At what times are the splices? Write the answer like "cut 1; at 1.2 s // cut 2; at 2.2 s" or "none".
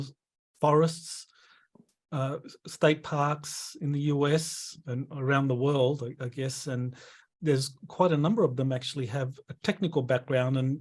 cut 1; at 7.2 s